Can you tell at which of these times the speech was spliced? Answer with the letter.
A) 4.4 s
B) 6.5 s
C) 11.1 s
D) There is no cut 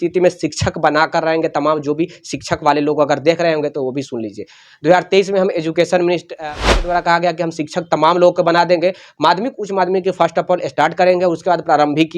B